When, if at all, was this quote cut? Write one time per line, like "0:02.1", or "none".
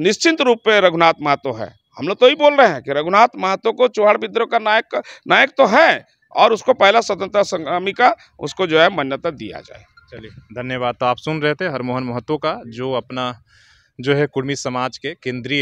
none